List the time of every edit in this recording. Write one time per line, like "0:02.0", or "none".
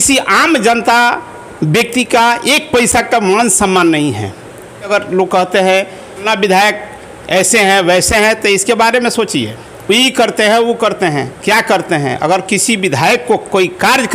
0:05.1
0:06.3